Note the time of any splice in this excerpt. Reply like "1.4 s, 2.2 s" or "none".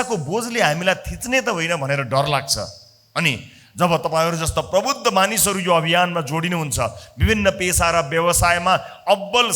none